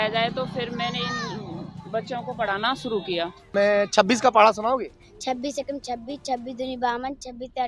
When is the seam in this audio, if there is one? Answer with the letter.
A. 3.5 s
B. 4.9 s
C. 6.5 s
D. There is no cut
A